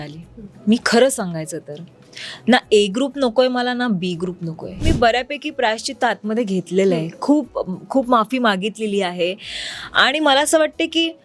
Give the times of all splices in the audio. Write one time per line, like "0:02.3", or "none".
0:04.8